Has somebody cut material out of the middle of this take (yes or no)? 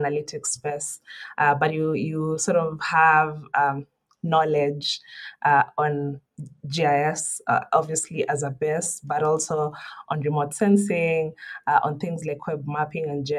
no